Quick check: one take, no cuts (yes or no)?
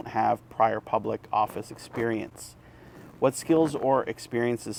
yes